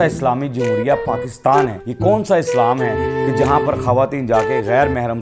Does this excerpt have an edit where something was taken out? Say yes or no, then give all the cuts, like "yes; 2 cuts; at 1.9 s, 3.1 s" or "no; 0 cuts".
yes; 1 cut; at 1.8 s